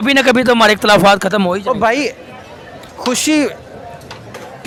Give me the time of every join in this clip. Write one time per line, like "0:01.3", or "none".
none